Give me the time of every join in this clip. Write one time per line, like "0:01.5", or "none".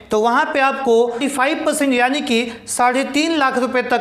none